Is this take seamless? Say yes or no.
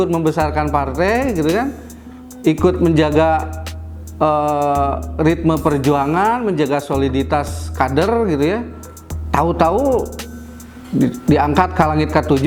yes